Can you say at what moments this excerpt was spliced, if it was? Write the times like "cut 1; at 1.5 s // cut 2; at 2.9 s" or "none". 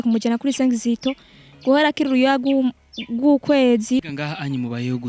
cut 1; at 4.0 s